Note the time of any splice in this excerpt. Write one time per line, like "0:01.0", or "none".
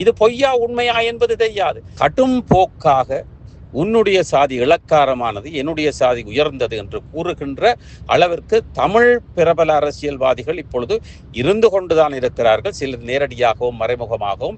0:01.9

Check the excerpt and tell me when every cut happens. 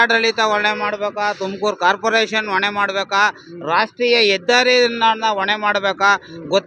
none

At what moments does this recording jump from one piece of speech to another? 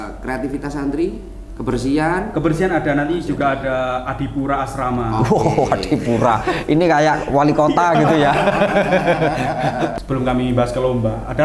0:09.9

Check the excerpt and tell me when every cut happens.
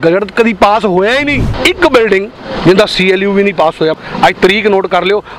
0:01.5
0:03.9

